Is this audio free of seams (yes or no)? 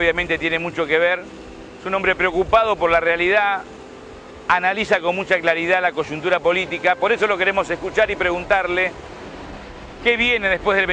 no